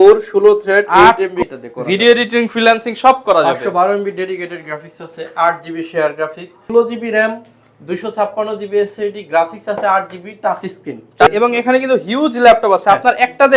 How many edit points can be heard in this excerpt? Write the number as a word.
three